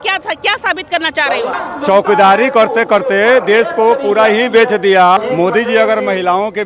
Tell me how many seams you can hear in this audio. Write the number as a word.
two